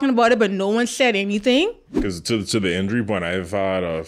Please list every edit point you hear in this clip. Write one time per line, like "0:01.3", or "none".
0:01.9